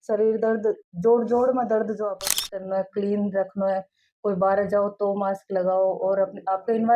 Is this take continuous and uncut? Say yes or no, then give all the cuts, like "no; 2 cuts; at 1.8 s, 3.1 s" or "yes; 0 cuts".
no; 1 cut; at 2.4 s